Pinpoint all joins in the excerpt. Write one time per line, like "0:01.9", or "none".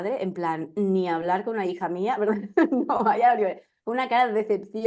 none

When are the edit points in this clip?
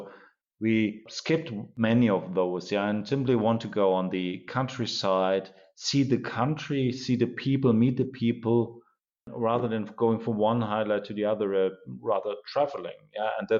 none

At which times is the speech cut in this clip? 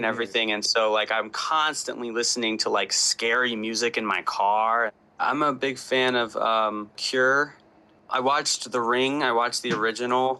0:05.2

